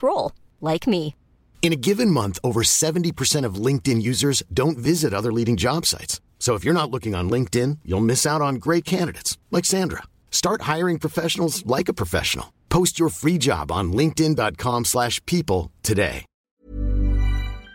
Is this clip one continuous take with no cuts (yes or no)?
no